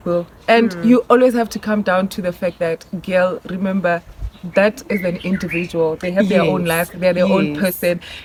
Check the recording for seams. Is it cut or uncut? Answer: uncut